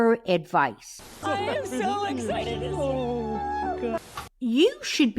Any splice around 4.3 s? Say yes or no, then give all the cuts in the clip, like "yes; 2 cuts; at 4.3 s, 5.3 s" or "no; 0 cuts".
yes; 1 cut; at 4.3 s